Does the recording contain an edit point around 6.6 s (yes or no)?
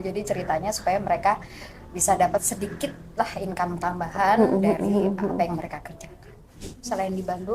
yes